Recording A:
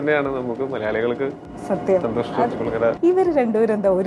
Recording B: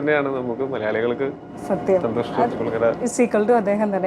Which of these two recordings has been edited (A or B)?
A